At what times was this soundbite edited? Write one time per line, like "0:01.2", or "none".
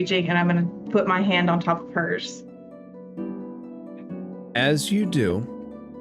0:02.2
0:04.5